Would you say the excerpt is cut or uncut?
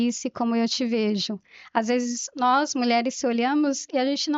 uncut